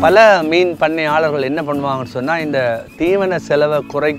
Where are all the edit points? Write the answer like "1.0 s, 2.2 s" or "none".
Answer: none